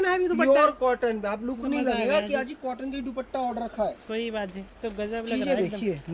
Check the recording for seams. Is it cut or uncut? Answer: uncut